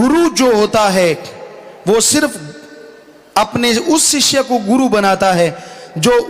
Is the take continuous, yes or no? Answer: yes